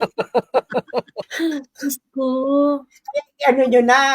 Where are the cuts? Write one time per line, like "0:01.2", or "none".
0:01.2